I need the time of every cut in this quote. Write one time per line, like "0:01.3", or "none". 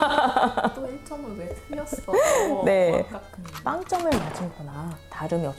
0:03.3